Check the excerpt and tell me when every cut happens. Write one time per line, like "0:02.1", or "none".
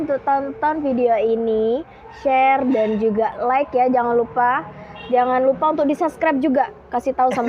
none